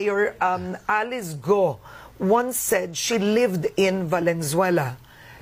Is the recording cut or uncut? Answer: uncut